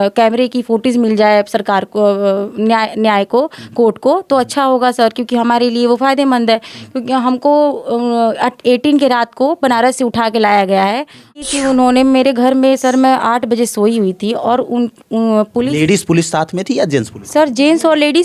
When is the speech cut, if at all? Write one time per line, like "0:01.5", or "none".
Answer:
0:11.4